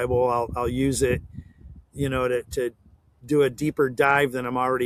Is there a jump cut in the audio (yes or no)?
no